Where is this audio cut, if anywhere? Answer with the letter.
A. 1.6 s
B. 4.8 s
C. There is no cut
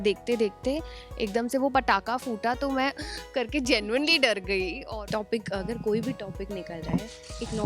B